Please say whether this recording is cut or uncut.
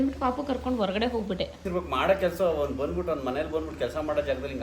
cut